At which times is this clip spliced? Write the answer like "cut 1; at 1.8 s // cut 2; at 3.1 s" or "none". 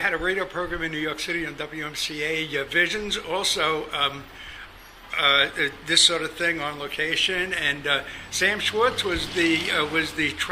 cut 1; at 1.2 s